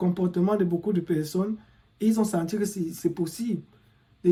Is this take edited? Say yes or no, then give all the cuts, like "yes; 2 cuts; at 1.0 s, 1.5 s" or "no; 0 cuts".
no; 0 cuts